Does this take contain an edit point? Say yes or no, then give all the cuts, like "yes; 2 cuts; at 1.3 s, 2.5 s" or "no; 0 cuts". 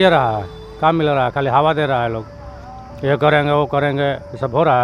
no; 0 cuts